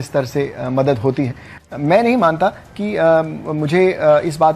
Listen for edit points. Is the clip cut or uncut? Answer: cut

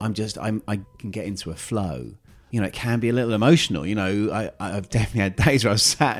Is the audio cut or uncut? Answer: cut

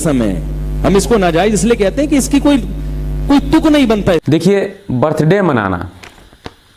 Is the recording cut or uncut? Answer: cut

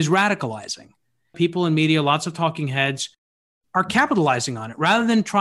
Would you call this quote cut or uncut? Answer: cut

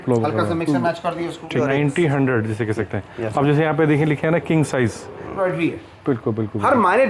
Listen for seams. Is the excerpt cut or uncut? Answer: cut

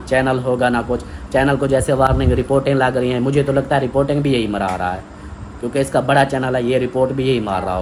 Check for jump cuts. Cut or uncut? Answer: uncut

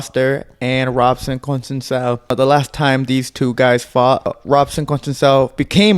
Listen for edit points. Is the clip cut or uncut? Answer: cut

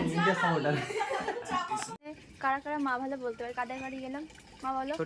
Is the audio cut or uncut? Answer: cut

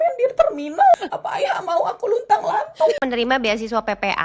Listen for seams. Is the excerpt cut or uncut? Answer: cut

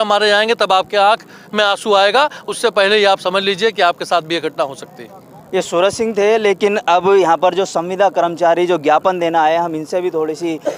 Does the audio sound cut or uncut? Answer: uncut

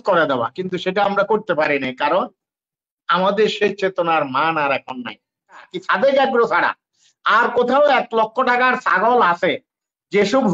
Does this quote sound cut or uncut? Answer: cut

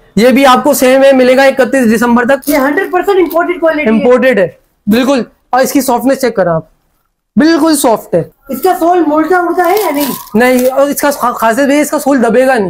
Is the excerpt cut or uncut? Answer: cut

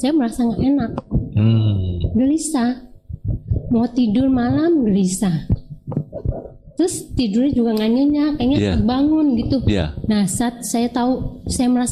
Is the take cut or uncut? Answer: uncut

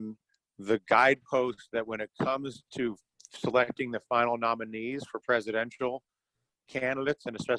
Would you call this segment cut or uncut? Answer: uncut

